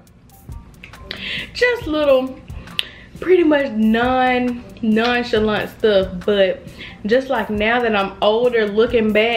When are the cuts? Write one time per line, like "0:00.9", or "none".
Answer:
none